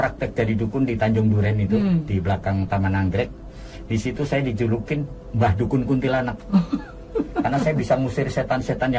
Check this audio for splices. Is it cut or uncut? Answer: uncut